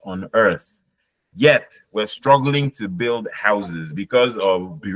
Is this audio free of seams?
yes; 0 cuts

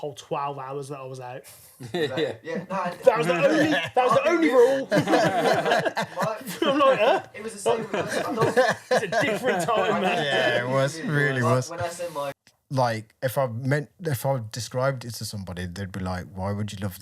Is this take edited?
yes; 1 cut; at 12.5 s

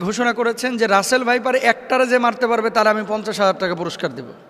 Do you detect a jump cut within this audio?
no; 0 cuts

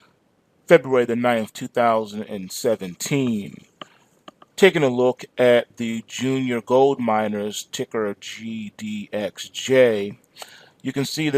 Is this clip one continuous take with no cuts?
no; 1 cut; at 6.9 s

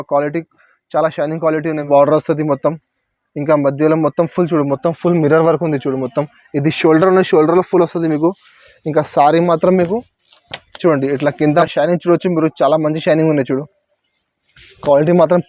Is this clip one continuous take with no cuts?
no; 2 cuts; at 1.9 s, 11.7 s

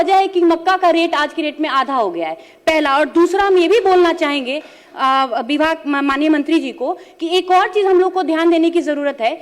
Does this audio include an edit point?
no; 0 cuts

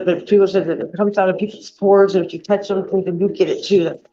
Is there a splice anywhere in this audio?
no; 0 cuts

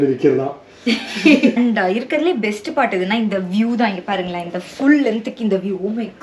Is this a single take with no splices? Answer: no; 1 cut; at 1.6 s

